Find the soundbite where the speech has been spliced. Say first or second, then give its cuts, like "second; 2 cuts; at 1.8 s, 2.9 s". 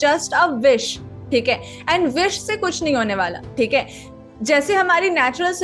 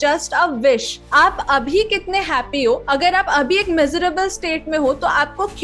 second; 1 cut; at 1.0 s